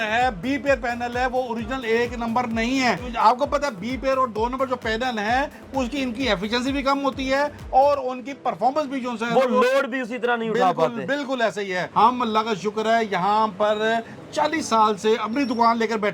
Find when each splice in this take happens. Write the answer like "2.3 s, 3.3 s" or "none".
3.1 s, 11.8 s